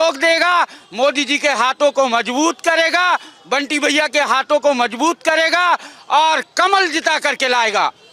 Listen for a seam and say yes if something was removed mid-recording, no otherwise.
no